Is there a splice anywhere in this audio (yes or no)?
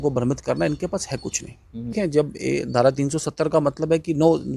yes